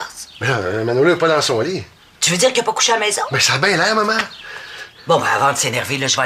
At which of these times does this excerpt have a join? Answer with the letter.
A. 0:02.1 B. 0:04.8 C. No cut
C